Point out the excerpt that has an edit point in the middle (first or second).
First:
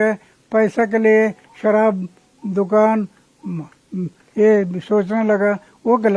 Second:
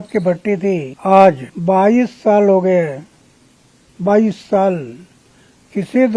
second